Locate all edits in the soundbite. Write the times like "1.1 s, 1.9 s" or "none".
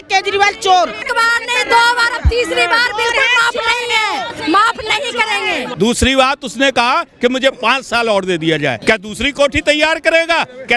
1.0 s, 5.7 s, 8.8 s